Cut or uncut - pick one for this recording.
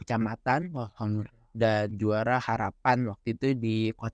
uncut